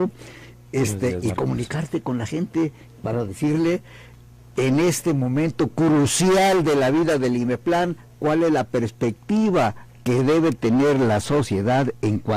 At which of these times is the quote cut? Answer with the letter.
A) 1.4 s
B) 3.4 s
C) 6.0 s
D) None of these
B